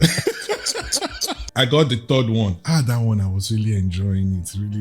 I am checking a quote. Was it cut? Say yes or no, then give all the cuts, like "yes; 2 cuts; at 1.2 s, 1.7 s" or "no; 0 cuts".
yes; 1 cut; at 1.4 s